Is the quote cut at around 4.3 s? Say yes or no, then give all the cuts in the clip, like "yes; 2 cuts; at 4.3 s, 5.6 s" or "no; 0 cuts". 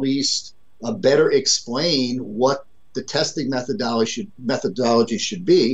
no; 0 cuts